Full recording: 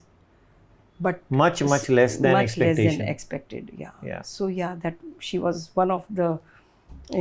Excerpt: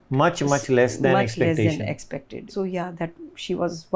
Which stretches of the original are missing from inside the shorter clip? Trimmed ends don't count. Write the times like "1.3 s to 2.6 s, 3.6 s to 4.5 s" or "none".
3.6 s to 4.3 s